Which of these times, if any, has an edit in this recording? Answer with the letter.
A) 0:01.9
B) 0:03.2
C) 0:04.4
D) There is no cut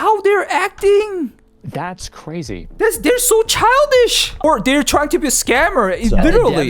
C